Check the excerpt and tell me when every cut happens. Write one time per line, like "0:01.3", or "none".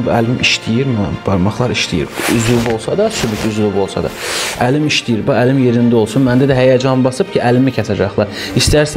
none